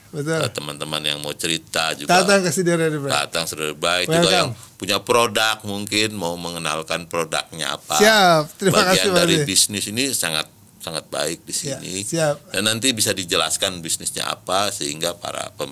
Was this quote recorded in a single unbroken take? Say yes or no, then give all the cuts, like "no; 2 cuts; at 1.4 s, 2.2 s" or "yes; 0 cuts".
yes; 0 cuts